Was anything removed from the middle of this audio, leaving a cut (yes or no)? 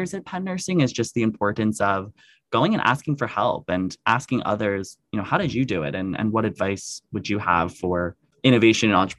yes